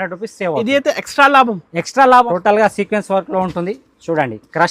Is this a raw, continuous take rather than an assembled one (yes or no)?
no